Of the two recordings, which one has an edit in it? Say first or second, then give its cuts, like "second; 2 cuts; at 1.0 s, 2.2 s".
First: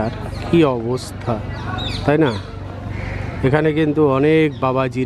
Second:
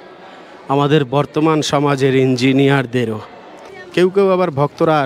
second; 1 cut; at 3.8 s